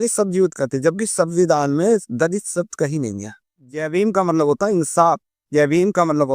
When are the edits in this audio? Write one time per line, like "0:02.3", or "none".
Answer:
0:03.8